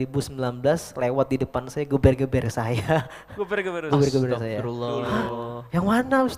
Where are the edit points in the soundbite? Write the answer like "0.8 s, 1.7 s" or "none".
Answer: none

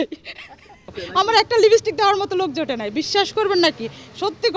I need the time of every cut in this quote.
1.0 s

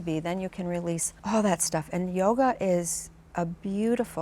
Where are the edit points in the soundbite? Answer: 1.1 s

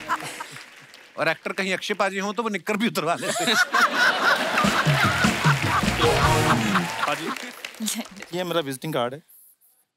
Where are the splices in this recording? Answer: 7.1 s

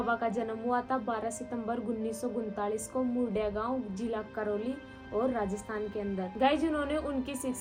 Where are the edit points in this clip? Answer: none

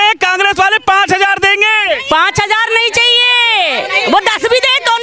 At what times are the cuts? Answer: none

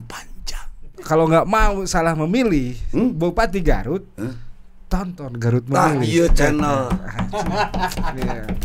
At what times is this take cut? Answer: 0.9 s

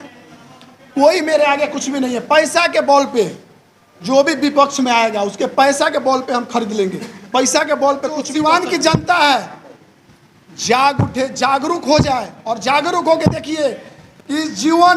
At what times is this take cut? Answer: 8.3 s

